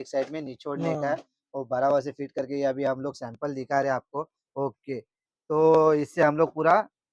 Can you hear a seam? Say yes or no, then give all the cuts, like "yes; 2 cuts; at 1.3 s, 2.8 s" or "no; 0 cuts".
no; 0 cuts